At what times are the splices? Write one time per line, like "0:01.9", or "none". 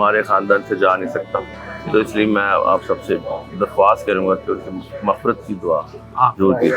none